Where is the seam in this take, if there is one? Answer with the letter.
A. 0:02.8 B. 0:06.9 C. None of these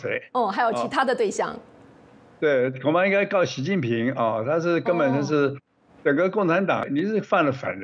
B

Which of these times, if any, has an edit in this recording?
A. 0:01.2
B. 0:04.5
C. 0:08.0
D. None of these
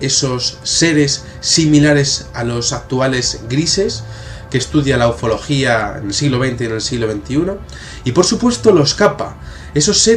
B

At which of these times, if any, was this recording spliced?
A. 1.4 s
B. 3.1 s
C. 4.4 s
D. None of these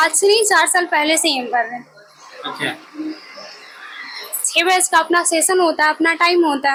D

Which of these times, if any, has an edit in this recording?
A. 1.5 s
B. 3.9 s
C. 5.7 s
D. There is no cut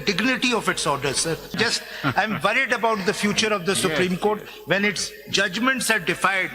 A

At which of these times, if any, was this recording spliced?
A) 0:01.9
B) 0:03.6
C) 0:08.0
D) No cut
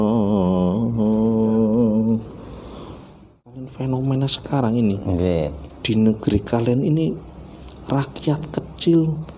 B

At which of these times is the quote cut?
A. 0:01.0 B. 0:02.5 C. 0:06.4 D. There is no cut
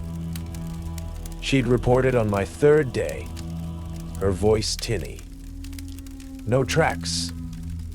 A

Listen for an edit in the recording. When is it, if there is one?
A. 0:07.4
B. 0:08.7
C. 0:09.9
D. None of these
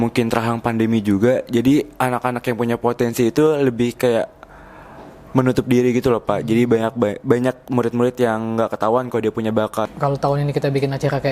C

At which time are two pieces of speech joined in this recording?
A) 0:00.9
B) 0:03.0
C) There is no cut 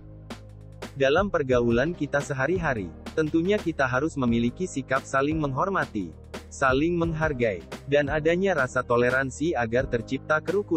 A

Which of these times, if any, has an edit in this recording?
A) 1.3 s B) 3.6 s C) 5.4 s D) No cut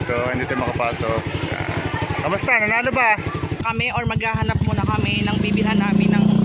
B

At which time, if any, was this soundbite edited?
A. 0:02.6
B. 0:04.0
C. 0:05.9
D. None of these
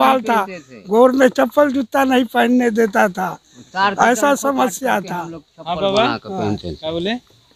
D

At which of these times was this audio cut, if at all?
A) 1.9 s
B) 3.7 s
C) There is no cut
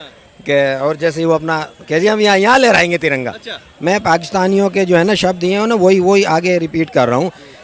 B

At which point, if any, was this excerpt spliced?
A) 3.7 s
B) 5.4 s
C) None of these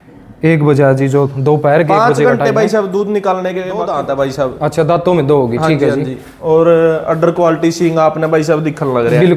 A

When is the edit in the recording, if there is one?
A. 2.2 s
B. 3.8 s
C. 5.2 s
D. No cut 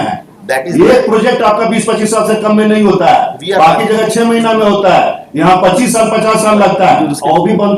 D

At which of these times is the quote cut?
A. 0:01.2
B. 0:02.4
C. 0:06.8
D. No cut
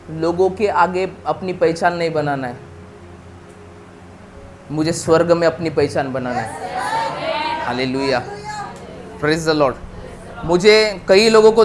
D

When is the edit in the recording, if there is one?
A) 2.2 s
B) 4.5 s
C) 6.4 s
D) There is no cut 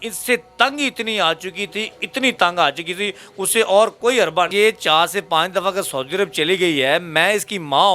B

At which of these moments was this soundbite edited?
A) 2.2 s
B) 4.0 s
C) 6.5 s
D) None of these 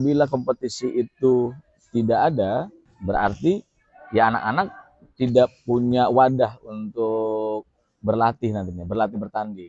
D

